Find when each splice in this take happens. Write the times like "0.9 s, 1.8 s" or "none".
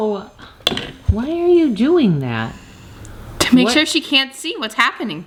none